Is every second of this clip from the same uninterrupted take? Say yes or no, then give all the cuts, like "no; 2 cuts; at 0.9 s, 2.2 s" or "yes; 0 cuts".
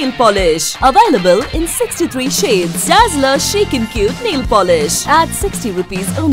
yes; 0 cuts